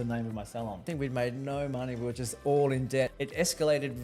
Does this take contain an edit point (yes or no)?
yes